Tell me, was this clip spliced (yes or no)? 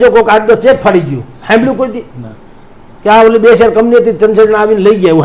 no